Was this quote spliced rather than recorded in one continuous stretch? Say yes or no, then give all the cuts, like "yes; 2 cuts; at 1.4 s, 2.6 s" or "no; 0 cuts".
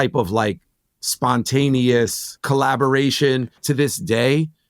yes; 2 cuts; at 2.3 s, 3.6 s